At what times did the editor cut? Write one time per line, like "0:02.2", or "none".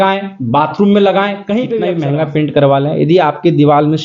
0:01.9